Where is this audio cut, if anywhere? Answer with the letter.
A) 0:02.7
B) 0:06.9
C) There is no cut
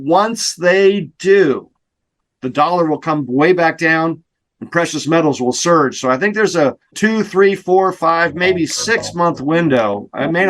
B